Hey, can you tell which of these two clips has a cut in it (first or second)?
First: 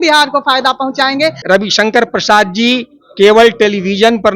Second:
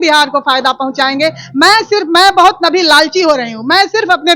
first